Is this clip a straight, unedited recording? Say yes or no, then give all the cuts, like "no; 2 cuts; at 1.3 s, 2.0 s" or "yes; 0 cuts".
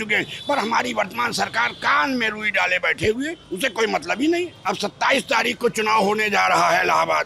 no; 1 cut; at 4.6 s